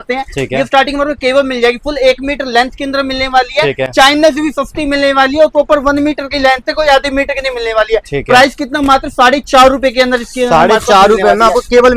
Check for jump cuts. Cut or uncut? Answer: uncut